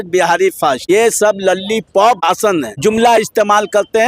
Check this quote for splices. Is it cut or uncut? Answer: cut